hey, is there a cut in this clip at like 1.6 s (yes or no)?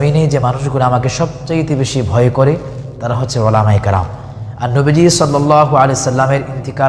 no